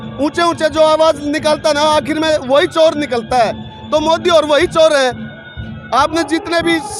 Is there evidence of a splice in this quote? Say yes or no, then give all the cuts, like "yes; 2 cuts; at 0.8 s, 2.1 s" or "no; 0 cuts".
no; 0 cuts